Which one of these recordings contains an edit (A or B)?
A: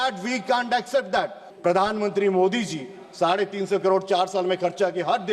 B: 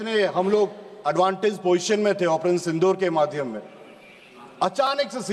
A